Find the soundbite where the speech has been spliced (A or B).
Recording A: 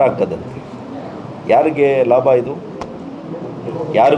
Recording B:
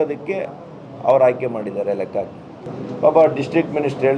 B